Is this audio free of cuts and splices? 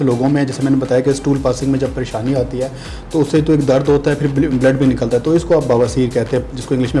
yes; 0 cuts

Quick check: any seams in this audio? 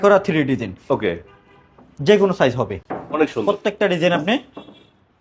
yes; 1 cut; at 2.8 s

